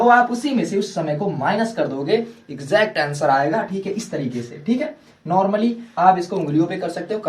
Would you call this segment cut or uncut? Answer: uncut